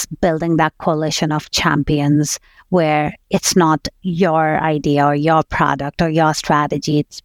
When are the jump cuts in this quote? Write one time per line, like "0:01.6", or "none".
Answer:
none